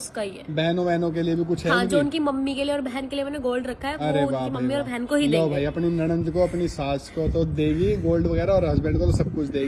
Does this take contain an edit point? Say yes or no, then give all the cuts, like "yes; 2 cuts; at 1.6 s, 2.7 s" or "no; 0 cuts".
no; 0 cuts